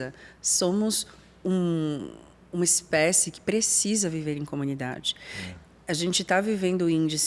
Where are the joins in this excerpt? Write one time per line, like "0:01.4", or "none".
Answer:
none